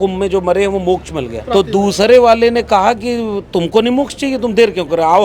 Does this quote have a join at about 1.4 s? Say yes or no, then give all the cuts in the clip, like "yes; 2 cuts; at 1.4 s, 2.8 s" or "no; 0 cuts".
yes; 1 cut; at 1.4 s